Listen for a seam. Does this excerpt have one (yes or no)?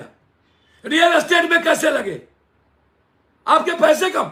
no